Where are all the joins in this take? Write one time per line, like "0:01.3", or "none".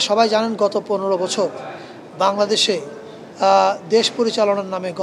none

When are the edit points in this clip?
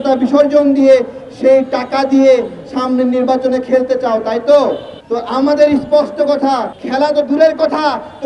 0:04.9
0:06.8

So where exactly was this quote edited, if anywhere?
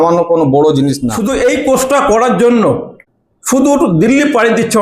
0:01.1
0:03.0

